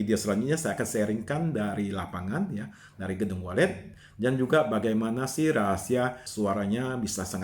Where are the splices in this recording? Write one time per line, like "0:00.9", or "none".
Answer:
0:06.2